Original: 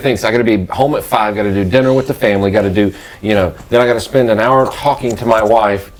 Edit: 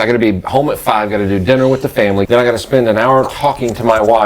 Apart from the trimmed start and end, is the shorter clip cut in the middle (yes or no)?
yes